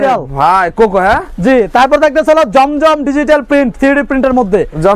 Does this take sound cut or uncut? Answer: uncut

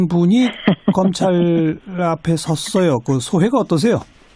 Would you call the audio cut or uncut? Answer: uncut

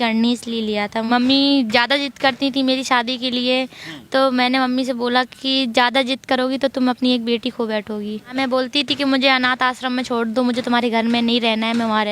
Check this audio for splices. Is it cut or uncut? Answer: cut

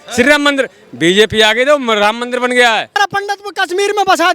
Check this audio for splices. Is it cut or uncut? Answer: cut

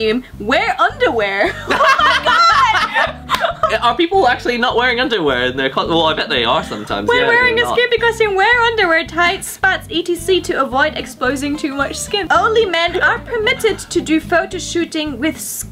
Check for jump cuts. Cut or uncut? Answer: uncut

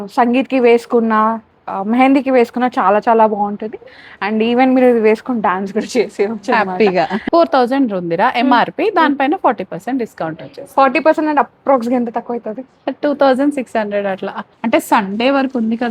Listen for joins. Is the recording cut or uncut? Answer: cut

